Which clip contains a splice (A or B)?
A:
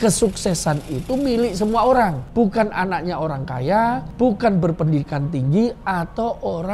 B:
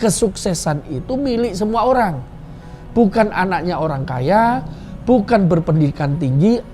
A